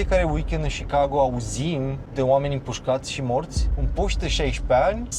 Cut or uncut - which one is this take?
cut